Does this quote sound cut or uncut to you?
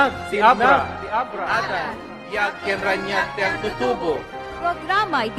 cut